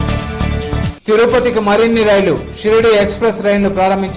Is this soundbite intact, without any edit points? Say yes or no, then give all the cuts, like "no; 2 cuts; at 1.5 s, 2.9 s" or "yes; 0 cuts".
no; 1 cut; at 0.9 s